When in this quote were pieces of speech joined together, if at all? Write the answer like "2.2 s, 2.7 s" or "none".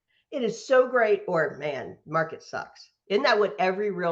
2.9 s